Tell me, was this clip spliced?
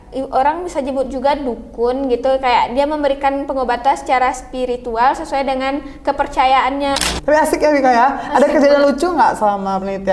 yes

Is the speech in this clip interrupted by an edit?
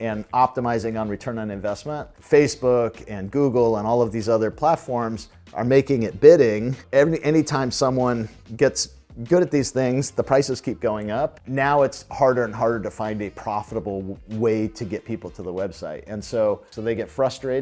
yes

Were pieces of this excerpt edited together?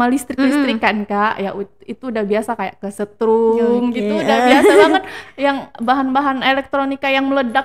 no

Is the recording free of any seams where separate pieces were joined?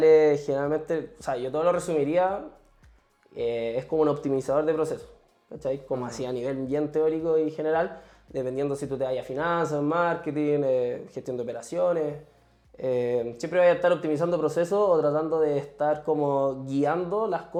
yes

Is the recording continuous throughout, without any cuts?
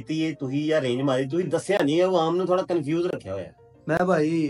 yes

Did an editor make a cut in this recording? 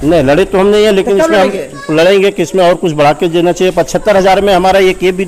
no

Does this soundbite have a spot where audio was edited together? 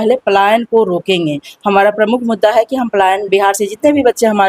no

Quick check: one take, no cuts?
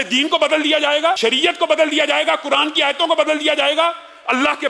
no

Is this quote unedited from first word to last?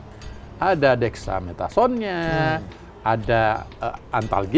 yes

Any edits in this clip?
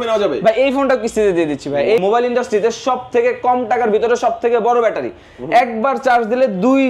yes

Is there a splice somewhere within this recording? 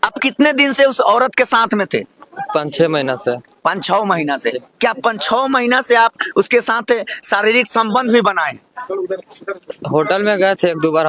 no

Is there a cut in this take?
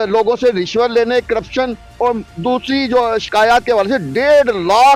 no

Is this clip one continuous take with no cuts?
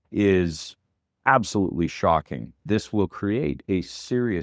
no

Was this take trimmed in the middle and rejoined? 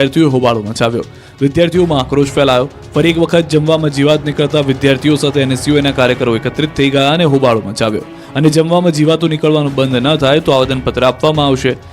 yes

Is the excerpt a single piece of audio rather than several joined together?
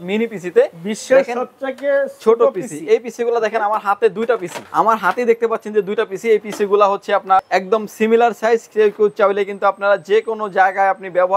yes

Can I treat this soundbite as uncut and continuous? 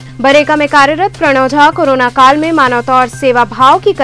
yes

